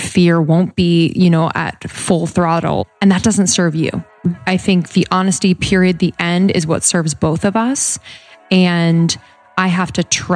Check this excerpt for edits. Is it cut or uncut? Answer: cut